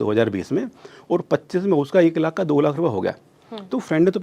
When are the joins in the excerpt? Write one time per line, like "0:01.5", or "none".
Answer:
none